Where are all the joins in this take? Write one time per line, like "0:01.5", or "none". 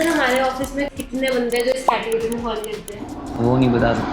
0:00.9

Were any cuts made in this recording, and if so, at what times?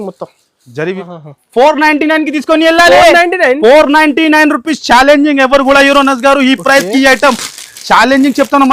0:01.0

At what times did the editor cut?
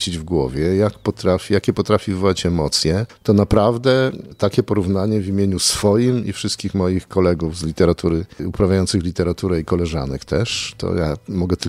0:03.1
0:08.4

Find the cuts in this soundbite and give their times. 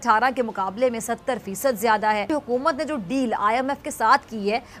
none

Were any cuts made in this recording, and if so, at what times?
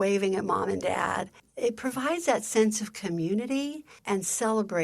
0:01.4
0:03.9

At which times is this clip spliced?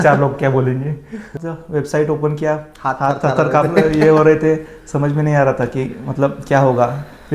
0:01.4

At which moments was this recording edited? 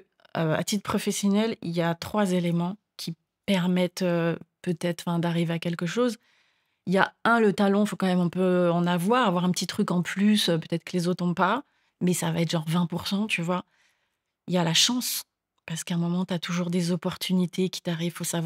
none

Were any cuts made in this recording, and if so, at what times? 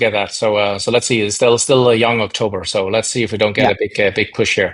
none

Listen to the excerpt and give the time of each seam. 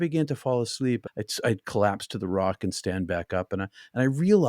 0:01.0

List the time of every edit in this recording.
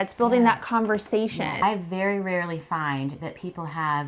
0:01.6

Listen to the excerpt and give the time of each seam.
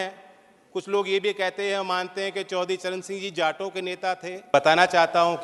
0:04.5

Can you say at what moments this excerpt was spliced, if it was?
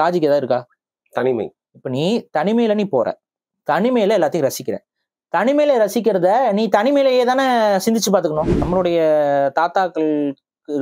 0:08.6

